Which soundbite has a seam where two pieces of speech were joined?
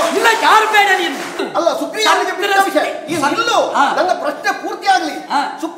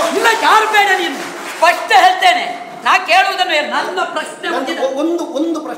first; 1 cut; at 1.4 s

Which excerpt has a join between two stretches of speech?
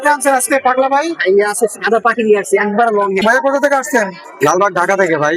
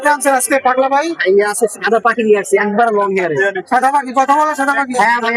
first; 1 cut; at 3.2 s

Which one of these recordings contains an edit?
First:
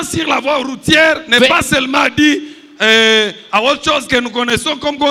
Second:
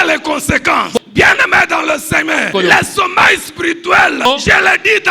second; 3 cuts; at 1.0 s, 2.5 s, 4.2 s

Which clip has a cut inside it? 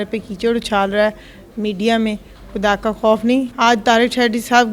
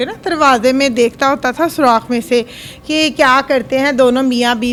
first; 1 cut; at 3.5 s

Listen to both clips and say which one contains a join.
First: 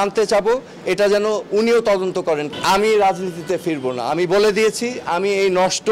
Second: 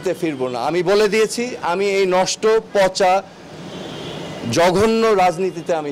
first; 1 cut; at 2.5 s

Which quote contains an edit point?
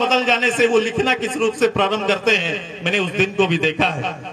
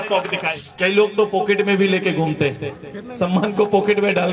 second; 1 cut; at 1.1 s

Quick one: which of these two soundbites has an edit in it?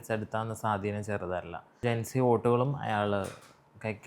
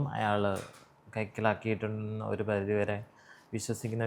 first; 1 cut; at 1.8 s

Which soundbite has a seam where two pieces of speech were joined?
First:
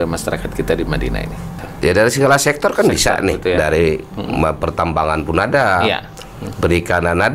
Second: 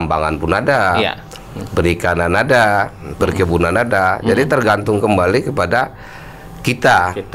first; 1 cut; at 1.6 s

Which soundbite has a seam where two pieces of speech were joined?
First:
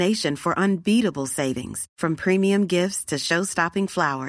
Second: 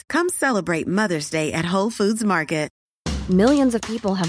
second; 1 cut; at 2.8 s

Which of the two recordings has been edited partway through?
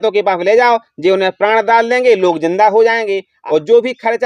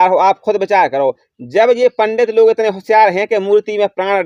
first; 1 cut; at 3.3 s

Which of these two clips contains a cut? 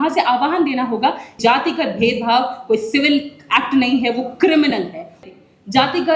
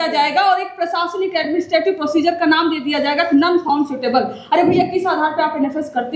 first; 2 cuts; at 1.3 s, 5.2 s

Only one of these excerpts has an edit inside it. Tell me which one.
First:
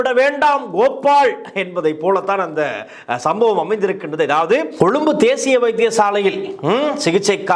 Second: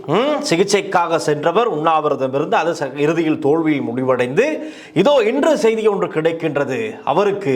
first; 1 cut; at 4.7 s

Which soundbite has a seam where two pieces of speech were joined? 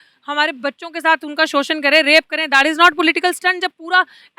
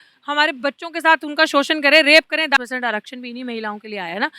second; 1 cut; at 2.5 s

